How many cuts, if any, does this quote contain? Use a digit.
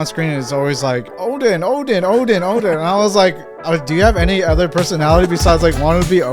0